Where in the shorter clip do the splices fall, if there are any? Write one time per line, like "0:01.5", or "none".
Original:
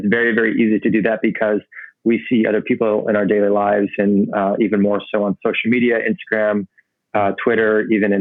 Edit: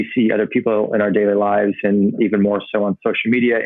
0:02.2